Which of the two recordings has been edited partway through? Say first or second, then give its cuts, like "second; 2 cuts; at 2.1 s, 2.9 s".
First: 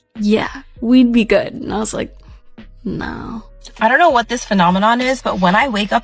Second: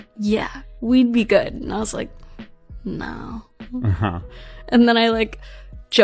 first; 1 cut; at 3.5 s